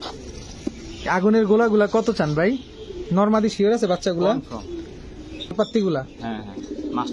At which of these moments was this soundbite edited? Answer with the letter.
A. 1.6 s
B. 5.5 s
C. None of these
B